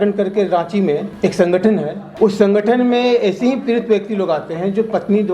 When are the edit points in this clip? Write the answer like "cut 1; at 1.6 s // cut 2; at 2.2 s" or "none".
cut 1; at 1.1 s // cut 2; at 2.0 s